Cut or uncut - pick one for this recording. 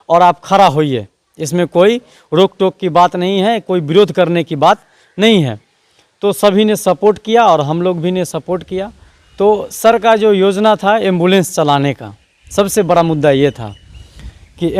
uncut